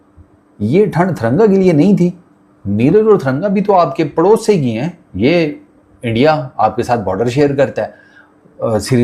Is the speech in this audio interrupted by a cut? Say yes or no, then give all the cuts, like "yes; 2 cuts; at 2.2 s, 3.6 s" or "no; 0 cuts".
no; 0 cuts